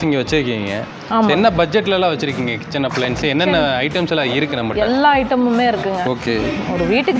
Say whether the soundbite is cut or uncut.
uncut